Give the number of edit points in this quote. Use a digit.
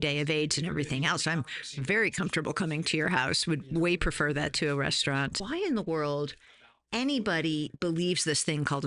1